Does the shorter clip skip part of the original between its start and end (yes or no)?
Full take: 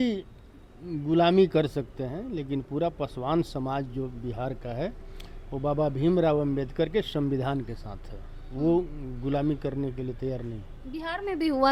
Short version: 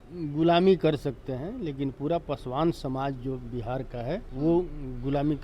yes